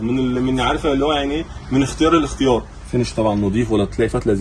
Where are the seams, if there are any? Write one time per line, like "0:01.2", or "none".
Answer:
0:02.8